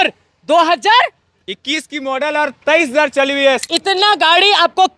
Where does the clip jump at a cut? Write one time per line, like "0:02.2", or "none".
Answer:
0:03.6